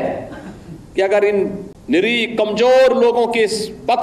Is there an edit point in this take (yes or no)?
yes